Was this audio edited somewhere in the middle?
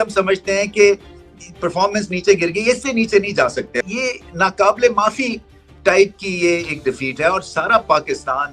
no; 0 cuts

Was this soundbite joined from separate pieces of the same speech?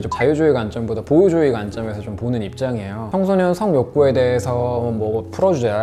no; 0 cuts

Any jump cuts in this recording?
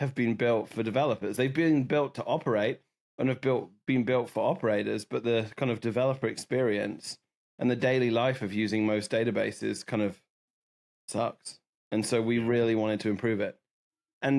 no; 0 cuts

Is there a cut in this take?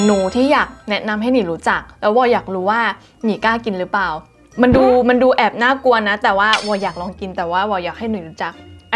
no; 0 cuts

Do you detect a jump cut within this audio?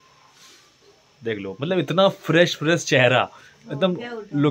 no; 0 cuts

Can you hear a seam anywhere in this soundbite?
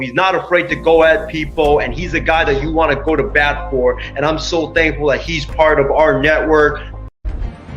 no; 0 cuts

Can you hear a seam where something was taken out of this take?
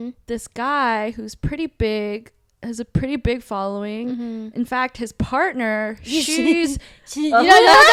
no; 0 cuts

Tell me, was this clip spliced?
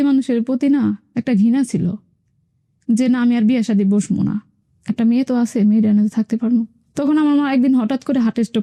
no; 0 cuts

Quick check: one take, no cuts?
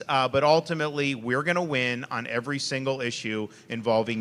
yes; 0 cuts

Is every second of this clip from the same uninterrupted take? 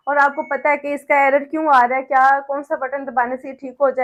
yes; 0 cuts

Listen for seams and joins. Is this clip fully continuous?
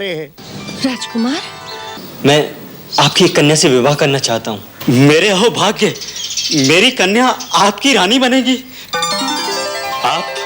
no; 1 cut; at 2.0 s

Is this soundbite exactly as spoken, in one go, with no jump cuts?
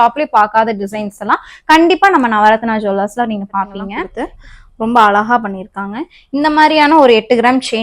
no; 1 cut; at 3.7 s

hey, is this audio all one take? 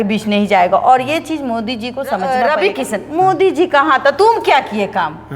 no; 1 cut; at 2.3 s

